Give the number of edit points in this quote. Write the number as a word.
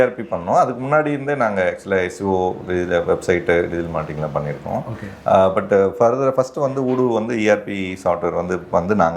zero